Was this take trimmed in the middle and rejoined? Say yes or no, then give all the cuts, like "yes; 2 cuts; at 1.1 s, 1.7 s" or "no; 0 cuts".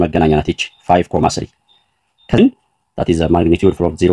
yes; 1 cut; at 2.4 s